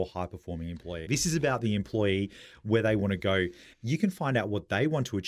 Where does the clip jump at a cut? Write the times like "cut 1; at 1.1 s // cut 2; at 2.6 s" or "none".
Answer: cut 1; at 1.0 s // cut 2; at 3.7 s